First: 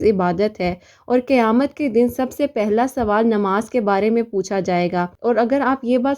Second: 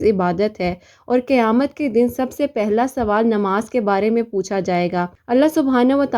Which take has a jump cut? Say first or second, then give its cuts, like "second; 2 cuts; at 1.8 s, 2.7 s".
first; 1 cut; at 5.1 s